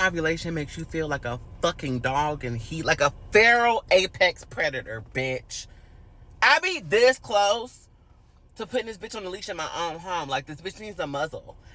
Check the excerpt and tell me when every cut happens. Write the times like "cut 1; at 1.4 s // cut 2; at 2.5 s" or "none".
none